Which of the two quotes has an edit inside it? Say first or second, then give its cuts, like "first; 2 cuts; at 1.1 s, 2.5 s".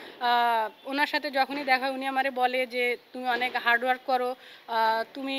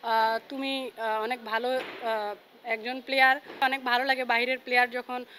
second; 1 cut; at 3.6 s